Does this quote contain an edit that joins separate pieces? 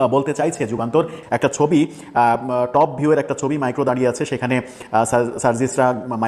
no; 0 cuts

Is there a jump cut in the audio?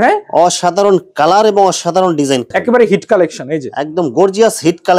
yes; 1 cut; at 2.5 s

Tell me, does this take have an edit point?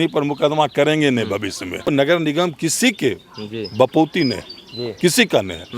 yes; 1 cut; at 1.9 s

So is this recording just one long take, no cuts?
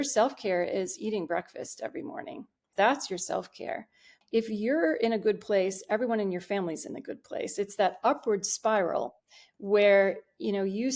no; 2 cuts; at 2.6 s, 4.1 s

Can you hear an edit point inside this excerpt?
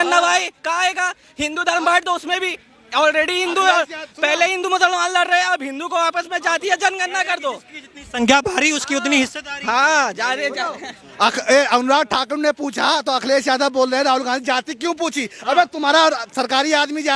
no; 0 cuts

